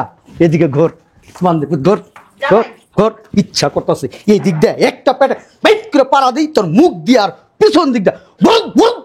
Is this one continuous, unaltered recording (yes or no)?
yes